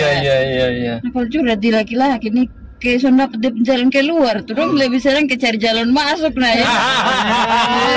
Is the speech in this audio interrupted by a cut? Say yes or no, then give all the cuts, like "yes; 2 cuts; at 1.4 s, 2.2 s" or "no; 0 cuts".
no; 0 cuts